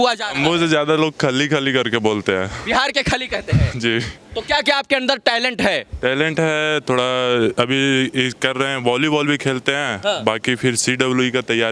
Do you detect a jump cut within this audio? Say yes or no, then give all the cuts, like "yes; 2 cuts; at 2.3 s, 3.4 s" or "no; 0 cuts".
no; 0 cuts